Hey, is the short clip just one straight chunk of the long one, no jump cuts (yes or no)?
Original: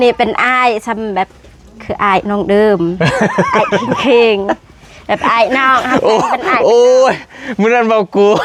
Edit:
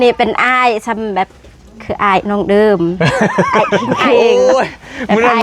no